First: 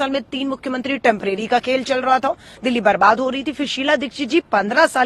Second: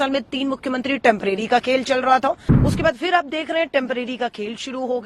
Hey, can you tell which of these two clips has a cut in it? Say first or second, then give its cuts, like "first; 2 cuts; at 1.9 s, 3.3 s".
second; 1 cut; at 2.5 s